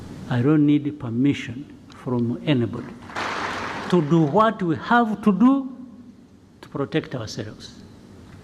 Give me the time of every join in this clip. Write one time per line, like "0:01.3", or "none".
0:03.2